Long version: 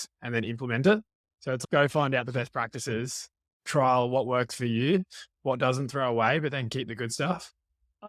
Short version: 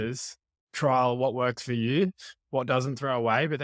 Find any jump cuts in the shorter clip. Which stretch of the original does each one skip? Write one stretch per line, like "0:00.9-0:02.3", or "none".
none